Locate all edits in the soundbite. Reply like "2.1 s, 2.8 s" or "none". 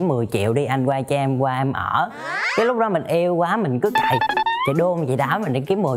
none